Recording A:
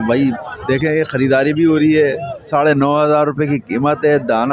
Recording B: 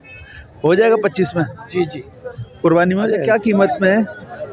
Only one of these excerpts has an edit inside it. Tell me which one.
B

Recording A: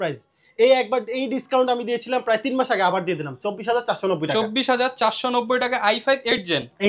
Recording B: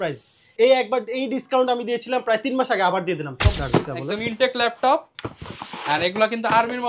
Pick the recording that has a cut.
B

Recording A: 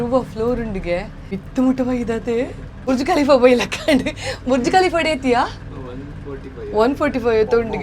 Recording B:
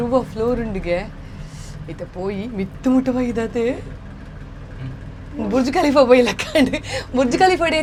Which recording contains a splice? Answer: A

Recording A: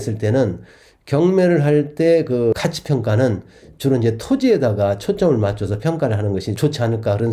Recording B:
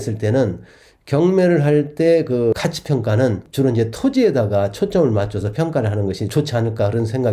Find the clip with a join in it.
B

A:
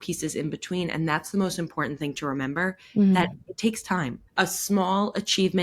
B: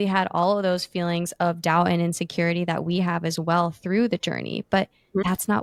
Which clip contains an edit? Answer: A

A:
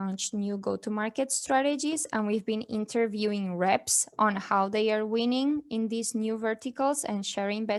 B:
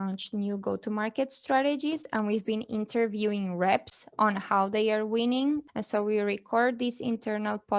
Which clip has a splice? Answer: B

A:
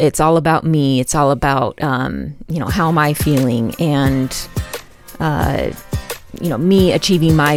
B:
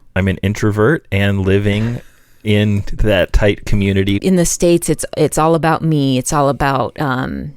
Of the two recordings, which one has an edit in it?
B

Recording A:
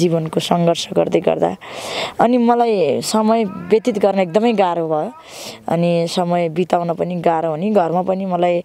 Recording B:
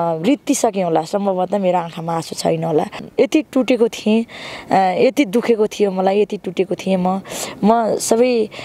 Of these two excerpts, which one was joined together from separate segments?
B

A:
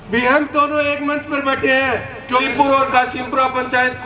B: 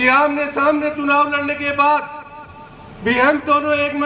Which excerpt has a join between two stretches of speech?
A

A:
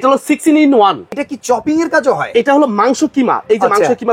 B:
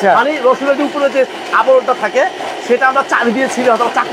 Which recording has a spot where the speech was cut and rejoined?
A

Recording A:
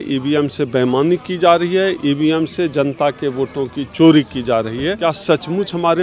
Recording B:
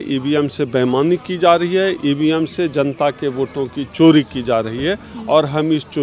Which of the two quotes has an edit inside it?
A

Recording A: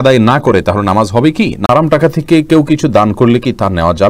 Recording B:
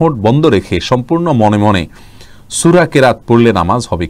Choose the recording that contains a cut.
A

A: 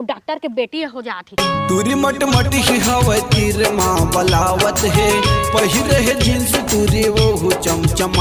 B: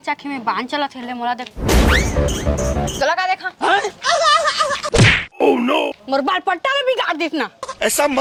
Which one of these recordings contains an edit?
A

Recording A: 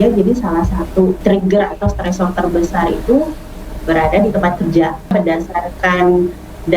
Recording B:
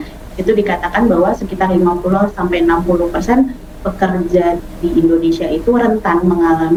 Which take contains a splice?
A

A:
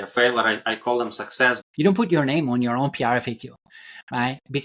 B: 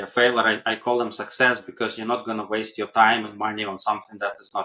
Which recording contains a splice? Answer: A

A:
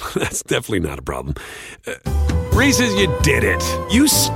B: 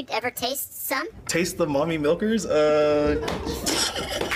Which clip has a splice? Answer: B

